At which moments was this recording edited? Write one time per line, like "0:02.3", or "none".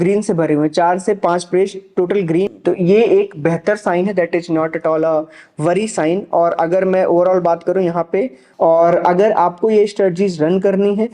0:02.6
0:08.4